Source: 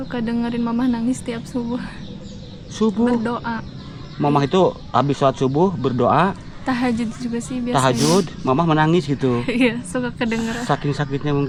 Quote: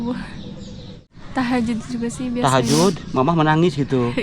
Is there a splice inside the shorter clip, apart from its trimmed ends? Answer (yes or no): yes